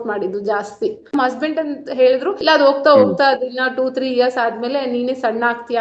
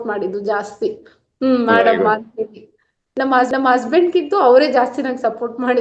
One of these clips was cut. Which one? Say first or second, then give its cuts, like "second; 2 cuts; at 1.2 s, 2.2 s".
first; 2 cuts; at 1.1 s, 2.3 s